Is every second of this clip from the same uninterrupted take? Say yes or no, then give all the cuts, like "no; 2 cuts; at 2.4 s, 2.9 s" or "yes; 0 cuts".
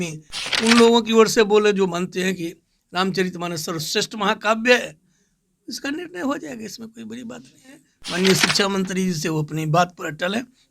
no; 1 cut; at 7.9 s